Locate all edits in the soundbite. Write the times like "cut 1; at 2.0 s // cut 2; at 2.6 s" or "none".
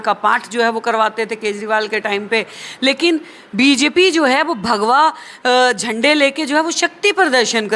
none